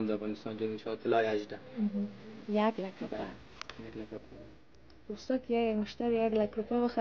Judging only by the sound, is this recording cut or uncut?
cut